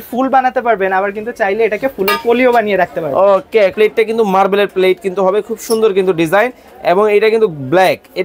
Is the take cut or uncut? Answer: cut